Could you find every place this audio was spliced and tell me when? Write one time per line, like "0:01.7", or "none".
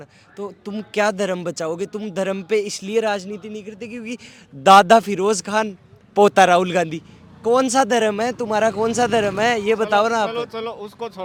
none